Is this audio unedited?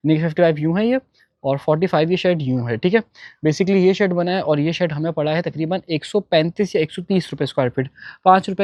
yes; 0 cuts

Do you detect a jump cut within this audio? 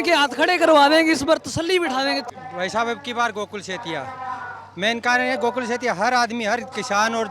yes; 1 cut; at 2.3 s

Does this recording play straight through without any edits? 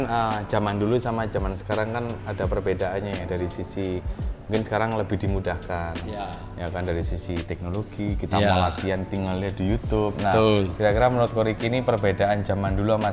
yes; 0 cuts

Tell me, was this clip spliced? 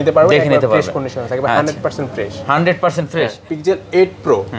yes; 1 cut; at 3.5 s

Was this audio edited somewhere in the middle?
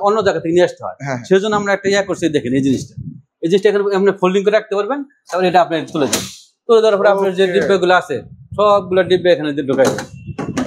no; 0 cuts

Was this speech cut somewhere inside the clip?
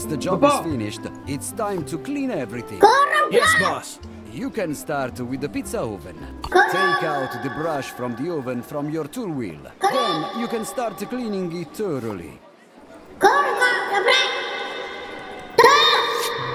no; 0 cuts

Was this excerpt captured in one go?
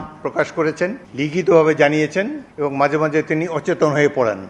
no; 2 cuts; at 1.0 s, 2.4 s

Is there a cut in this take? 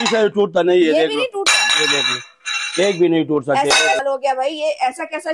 yes; 1 cut; at 4.0 s

